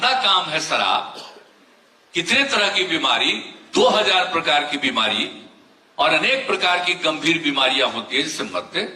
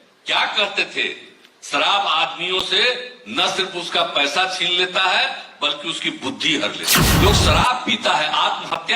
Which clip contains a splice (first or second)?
second